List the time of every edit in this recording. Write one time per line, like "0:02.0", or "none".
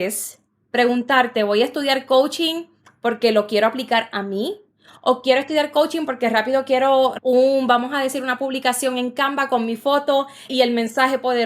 0:07.2
0:10.5